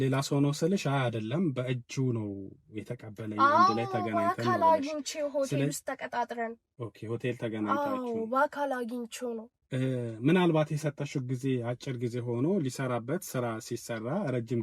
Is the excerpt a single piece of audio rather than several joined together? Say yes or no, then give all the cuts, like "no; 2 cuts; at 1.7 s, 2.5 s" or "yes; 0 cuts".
yes; 0 cuts